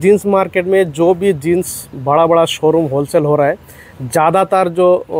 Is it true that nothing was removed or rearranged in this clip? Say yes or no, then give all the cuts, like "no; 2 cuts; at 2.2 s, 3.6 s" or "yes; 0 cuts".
yes; 0 cuts